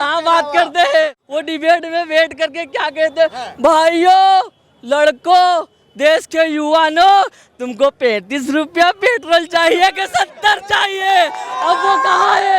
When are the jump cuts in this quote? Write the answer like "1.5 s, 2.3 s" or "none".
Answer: 1.2 s

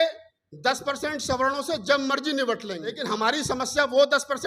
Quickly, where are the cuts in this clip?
3.0 s

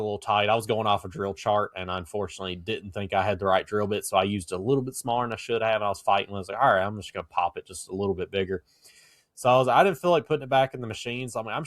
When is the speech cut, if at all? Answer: none

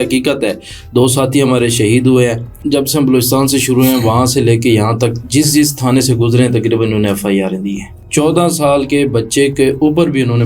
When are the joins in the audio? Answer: 2.6 s, 7.9 s

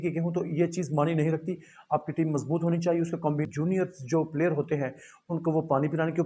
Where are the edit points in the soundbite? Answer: 3.5 s

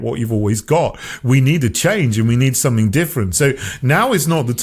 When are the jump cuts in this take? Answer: none

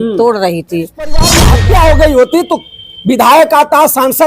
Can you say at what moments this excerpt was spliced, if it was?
1.3 s

